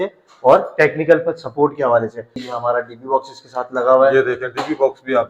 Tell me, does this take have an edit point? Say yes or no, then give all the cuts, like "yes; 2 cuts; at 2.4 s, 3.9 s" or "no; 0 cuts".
yes; 1 cut; at 2.4 s